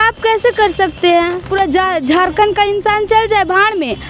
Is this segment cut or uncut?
cut